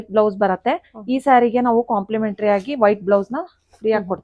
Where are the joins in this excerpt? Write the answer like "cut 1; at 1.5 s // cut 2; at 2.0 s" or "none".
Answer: none